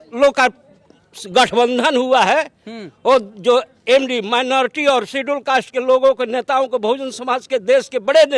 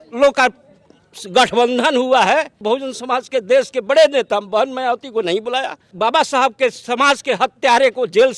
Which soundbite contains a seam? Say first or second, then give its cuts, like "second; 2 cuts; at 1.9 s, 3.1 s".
second; 2 cuts; at 2.6 s, 5.9 s